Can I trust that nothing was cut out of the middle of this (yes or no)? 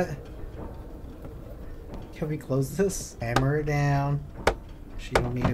no